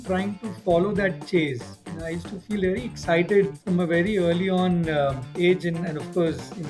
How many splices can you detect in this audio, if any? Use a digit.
2